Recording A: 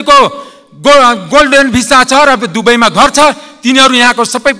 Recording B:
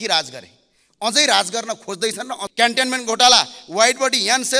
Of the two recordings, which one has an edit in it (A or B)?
B